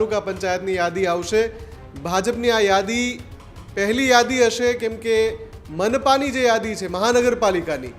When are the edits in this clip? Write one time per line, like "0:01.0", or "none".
none